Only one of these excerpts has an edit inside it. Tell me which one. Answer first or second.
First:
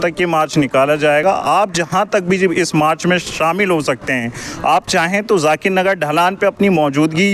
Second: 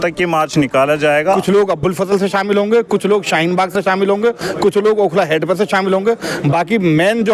second